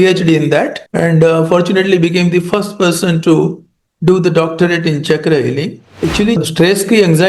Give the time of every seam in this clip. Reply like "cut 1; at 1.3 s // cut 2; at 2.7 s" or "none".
cut 1; at 5.9 s

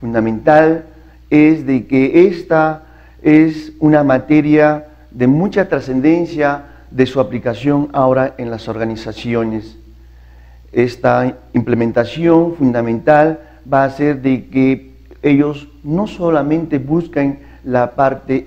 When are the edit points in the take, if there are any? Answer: cut 1; at 11.8 s

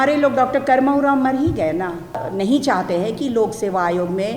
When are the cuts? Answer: cut 1; at 2.2 s

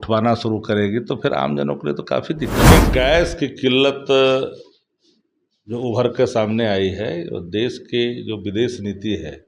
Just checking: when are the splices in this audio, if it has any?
cut 1; at 2.7 s

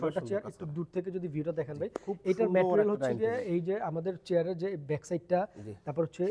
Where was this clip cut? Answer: none

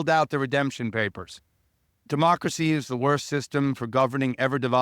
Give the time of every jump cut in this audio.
cut 1; at 2.0 s

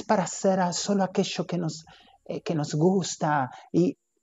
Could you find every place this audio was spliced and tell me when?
none

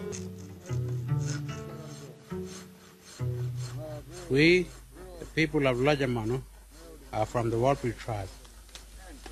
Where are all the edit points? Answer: none

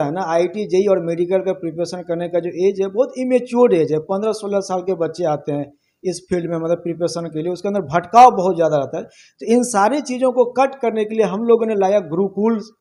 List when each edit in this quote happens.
none

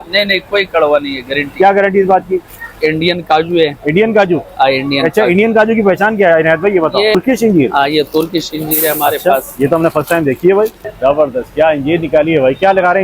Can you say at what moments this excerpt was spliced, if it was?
cut 1; at 2.5 s // cut 2; at 7.2 s // cut 3; at 10.8 s

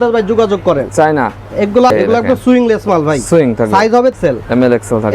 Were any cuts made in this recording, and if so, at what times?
cut 1; at 1.9 s // cut 2; at 4.2 s

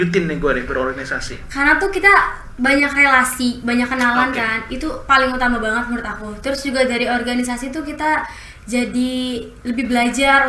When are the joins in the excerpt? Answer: none

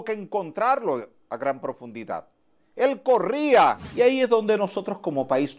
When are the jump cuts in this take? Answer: cut 1; at 3.8 s

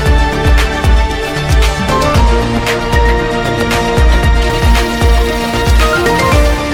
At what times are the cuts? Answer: none

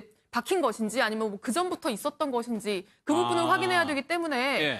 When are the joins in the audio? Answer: none

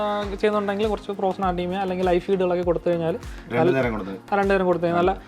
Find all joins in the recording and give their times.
none

